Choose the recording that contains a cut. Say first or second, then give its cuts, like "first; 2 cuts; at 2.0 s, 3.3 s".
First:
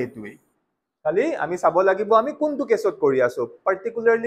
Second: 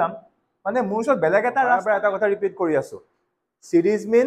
second; 1 cut; at 1.8 s